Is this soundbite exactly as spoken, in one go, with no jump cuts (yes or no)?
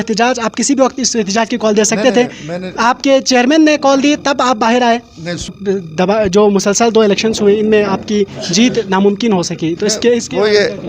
no